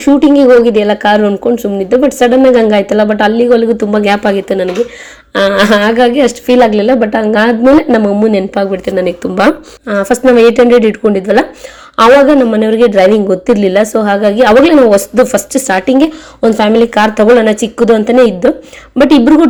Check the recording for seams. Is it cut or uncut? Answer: uncut